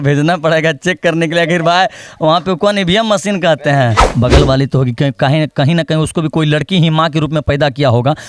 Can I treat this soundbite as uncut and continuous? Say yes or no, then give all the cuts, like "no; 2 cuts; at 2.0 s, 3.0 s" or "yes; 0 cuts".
no; 1 cut; at 4.0 s